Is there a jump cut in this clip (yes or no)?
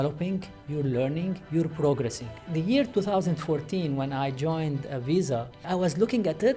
yes